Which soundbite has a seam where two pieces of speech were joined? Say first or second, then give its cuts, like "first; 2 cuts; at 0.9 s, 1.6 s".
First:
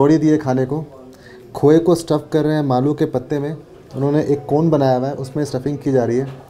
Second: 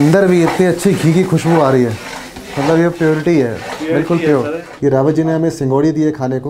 second; 1 cut; at 4.7 s